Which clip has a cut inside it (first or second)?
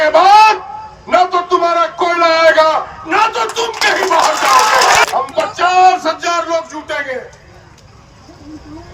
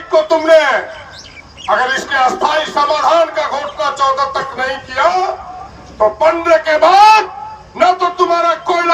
first